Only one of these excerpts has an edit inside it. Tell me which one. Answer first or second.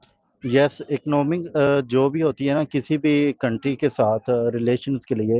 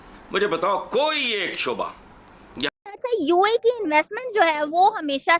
second